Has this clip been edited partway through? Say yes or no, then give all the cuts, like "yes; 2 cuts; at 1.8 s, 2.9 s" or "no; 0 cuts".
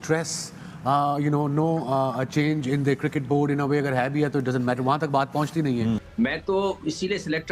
yes; 1 cut; at 6.1 s